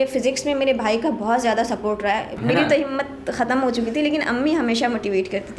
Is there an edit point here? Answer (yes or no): yes